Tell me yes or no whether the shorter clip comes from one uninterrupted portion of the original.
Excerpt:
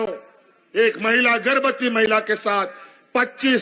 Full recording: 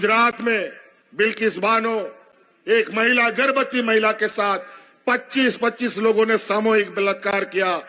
yes